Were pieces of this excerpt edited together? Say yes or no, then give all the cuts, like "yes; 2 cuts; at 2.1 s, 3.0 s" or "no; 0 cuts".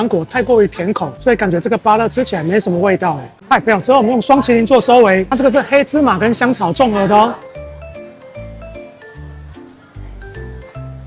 no; 0 cuts